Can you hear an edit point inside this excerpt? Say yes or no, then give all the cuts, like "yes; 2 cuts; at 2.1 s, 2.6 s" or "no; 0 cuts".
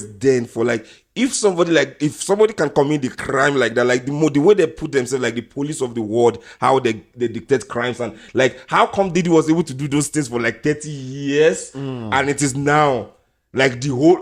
no; 0 cuts